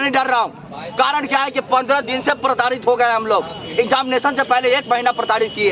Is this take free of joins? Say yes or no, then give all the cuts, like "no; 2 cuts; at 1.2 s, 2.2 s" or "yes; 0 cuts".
yes; 0 cuts